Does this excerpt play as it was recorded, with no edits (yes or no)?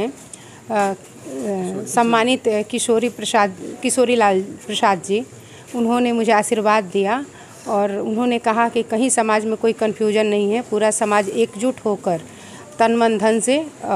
yes